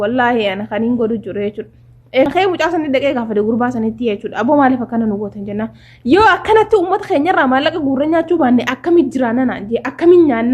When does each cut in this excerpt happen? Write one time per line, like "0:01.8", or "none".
0:02.3